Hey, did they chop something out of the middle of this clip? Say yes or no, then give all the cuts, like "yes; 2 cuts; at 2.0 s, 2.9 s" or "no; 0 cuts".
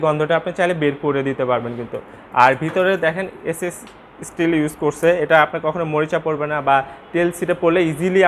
no; 0 cuts